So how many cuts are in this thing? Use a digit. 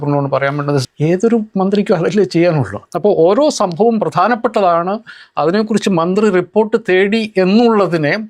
2